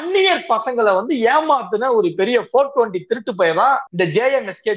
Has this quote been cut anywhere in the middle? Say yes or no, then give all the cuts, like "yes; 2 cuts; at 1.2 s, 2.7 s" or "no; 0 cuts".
yes; 1 cut; at 3.9 s